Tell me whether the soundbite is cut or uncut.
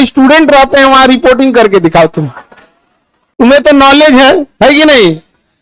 uncut